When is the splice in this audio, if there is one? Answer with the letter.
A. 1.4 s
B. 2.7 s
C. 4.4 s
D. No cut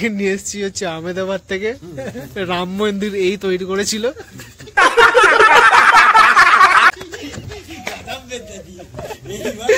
D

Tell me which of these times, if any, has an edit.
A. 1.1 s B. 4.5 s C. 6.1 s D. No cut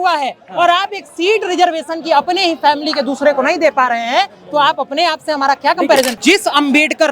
C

